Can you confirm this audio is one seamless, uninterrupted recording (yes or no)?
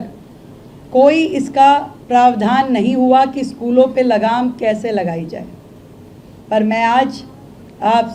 yes